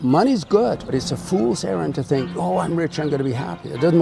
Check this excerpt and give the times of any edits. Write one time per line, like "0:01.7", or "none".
0:00.9